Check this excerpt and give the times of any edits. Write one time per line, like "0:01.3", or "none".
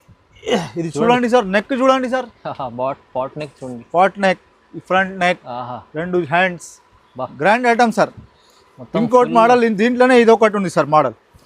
none